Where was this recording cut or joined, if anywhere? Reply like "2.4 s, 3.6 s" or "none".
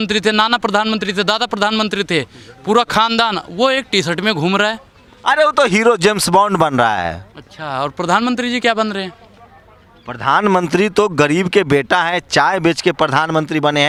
none